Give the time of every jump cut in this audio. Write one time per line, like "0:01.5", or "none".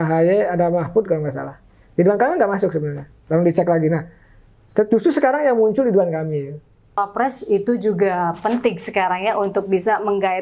0:07.0